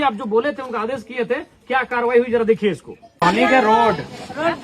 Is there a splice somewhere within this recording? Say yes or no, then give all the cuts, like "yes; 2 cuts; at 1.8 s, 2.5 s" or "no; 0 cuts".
yes; 1 cut; at 3.2 s